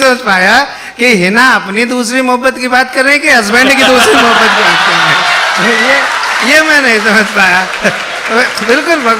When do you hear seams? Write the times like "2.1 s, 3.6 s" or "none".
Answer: none